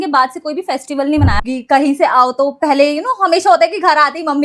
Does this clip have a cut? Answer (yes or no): yes